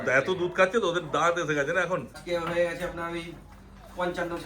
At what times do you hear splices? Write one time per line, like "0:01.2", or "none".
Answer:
0:02.1